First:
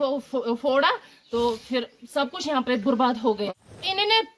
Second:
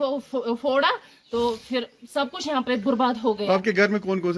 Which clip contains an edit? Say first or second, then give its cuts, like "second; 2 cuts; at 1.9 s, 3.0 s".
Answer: first; 1 cut; at 3.5 s